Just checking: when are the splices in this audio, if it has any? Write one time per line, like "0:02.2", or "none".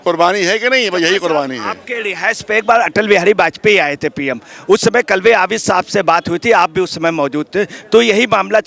none